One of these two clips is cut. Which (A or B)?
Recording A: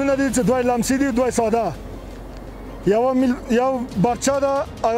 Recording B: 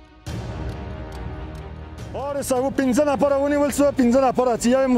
B